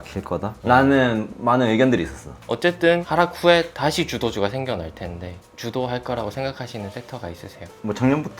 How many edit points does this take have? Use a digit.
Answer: 1